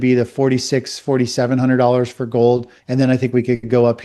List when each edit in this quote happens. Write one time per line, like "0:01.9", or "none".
0:02.8